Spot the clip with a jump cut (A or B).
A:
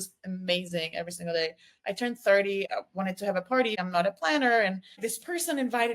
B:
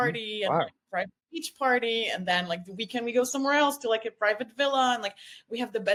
A